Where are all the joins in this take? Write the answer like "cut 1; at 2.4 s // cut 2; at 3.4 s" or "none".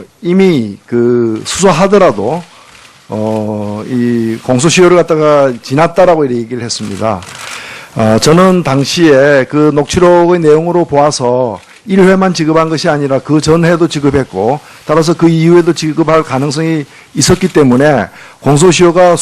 cut 1; at 1.5 s